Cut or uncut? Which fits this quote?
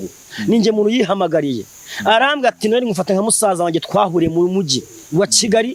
uncut